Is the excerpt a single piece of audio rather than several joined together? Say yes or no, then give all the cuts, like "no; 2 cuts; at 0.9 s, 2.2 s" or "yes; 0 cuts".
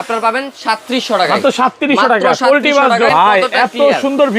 no; 1 cut; at 3.1 s